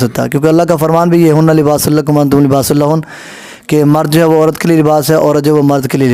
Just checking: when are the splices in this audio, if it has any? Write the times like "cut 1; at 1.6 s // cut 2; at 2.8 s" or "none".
none